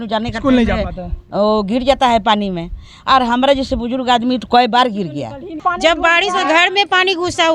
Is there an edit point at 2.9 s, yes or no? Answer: no